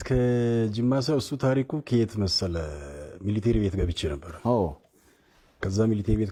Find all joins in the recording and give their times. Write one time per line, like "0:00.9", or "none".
none